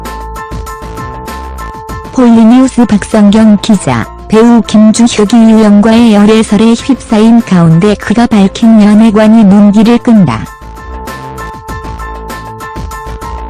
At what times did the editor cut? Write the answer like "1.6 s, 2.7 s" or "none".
none